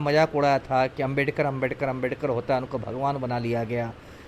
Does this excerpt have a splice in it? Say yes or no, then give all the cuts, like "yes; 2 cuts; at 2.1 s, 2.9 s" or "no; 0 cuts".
no; 0 cuts